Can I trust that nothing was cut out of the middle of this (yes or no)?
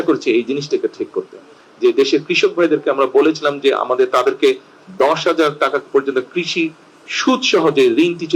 no